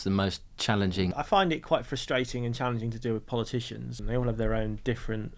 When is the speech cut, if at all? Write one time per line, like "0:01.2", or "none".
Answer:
0:01.1
0:04.0